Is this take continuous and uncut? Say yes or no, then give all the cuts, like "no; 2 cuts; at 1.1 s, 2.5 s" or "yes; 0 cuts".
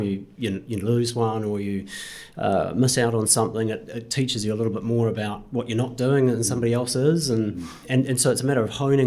no; 1 cut; at 7.8 s